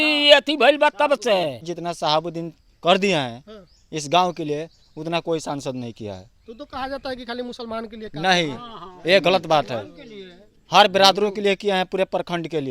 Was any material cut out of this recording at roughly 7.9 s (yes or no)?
no